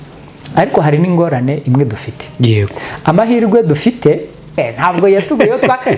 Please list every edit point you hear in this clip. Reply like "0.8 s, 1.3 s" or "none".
4.6 s